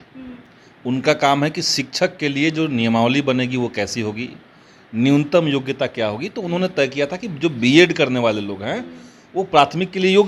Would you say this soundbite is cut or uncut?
uncut